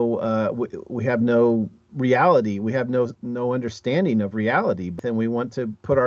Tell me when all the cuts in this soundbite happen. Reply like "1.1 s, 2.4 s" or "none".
4.9 s

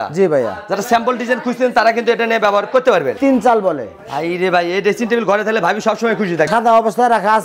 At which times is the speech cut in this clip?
3.2 s, 6.5 s

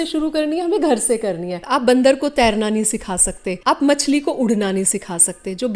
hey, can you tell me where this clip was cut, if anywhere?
1.6 s, 3.5 s

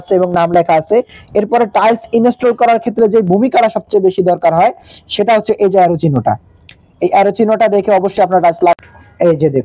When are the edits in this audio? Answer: 8.7 s

